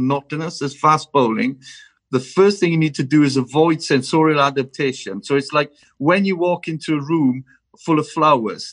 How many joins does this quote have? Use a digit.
0